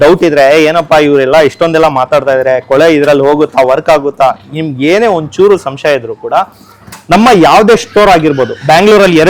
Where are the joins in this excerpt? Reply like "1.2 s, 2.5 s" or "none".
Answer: none